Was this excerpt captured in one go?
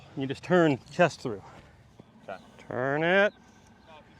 no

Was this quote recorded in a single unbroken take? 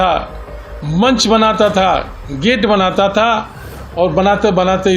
yes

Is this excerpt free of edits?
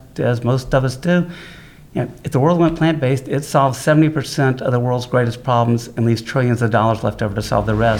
yes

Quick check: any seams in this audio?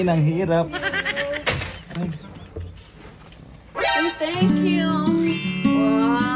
no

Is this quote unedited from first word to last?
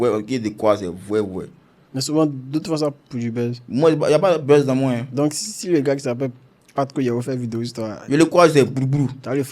yes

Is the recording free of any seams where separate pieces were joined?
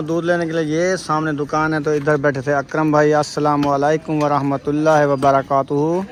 yes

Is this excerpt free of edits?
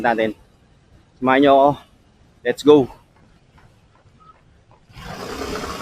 yes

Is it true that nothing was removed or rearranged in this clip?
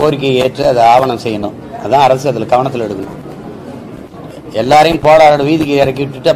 yes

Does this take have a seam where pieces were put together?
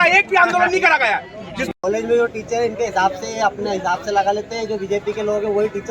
yes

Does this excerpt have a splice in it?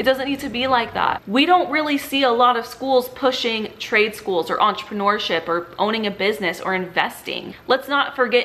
yes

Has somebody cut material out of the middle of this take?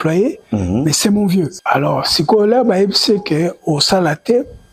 yes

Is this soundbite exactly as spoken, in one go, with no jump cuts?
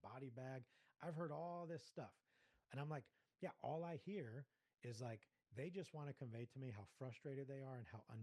yes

